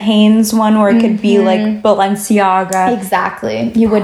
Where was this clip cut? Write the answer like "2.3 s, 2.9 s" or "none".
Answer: none